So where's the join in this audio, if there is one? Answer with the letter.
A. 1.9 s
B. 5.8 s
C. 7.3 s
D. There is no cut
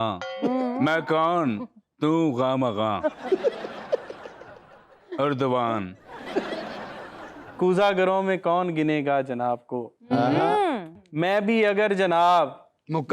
C